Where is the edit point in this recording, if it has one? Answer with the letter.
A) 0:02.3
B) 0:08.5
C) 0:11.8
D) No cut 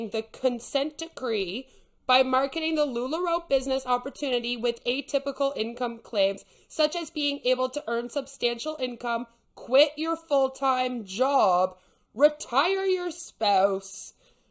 D